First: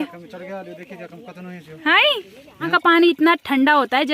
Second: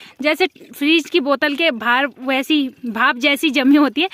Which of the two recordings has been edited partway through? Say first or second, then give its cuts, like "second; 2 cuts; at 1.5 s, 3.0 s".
first; 1 cut; at 2.7 s